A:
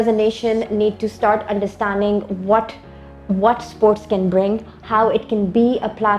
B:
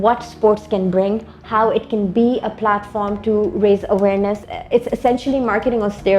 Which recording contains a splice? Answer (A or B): B